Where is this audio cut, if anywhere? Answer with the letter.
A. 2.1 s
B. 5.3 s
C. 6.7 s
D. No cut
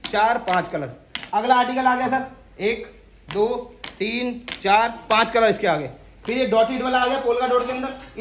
D